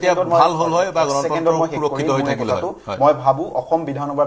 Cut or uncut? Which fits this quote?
uncut